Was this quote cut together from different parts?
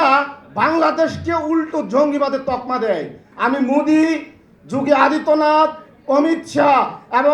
yes; 1 cut; at 3.2 s

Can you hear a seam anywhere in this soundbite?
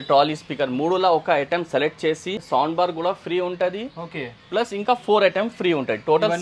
yes; 1 cut; at 2.4 s

